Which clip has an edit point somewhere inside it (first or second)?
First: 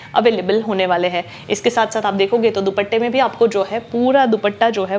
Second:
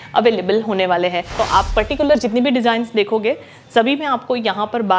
second